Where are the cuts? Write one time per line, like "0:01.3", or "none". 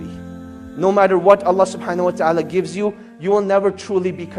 none